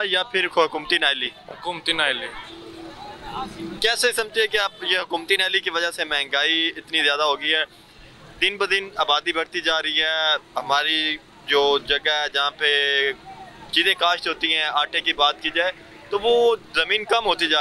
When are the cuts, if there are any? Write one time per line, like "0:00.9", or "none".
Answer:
none